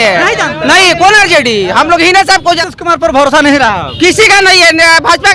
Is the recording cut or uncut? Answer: cut